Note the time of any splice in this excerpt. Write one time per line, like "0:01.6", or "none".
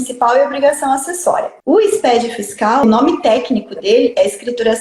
0:01.5
0:02.8